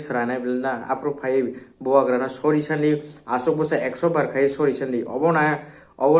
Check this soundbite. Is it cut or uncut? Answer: uncut